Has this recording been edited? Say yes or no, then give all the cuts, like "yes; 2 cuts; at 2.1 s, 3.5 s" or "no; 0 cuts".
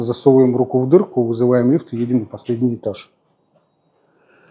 no; 0 cuts